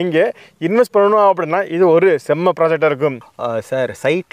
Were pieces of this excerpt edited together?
yes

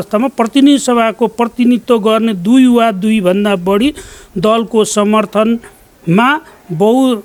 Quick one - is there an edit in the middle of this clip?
no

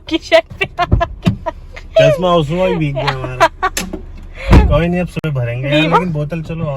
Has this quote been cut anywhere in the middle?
no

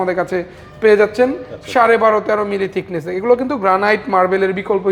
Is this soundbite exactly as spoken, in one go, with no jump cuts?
yes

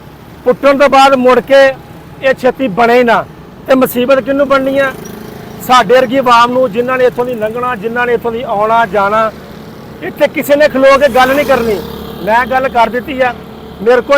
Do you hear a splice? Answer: no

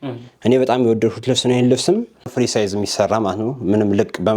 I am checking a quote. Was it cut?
yes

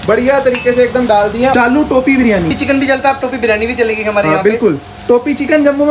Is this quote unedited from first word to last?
no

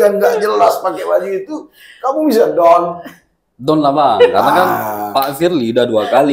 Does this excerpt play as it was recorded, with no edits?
yes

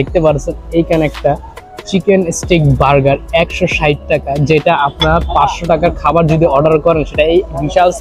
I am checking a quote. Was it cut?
no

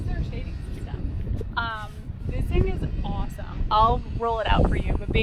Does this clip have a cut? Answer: no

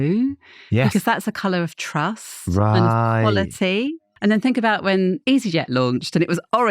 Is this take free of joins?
no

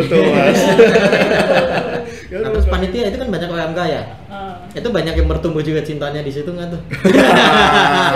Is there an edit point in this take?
yes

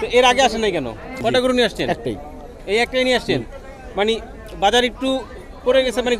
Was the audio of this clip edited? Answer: yes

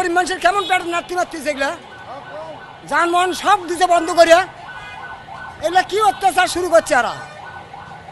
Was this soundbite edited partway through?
no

